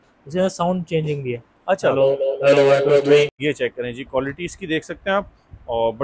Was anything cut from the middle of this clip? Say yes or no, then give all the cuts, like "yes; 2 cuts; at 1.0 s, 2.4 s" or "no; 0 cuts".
yes; 1 cut; at 3.3 s